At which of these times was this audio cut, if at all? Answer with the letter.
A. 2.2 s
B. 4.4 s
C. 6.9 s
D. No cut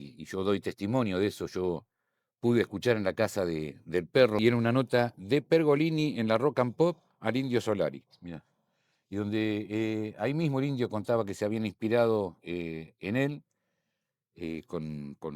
B